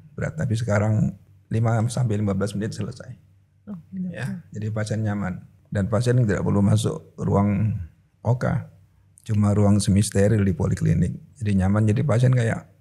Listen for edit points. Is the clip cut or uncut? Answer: cut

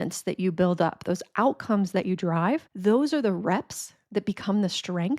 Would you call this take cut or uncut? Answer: cut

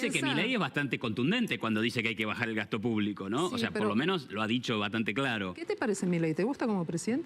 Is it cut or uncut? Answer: uncut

